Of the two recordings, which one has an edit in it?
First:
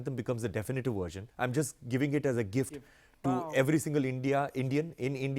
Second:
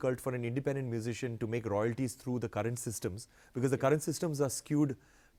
first; 1 cut; at 1.2 s

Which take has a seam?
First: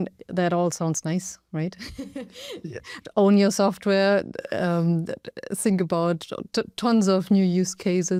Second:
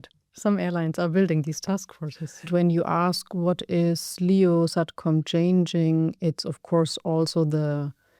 second; 1 cut; at 2.5 s

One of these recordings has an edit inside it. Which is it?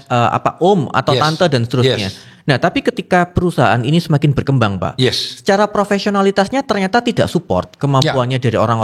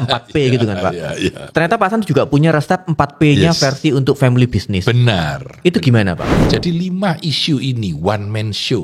second; 1 cut; at 6.3 s

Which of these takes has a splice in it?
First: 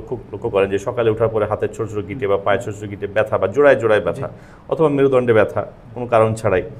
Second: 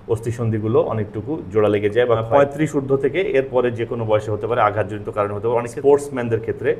second; 2 cuts; at 2.3 s, 5.7 s

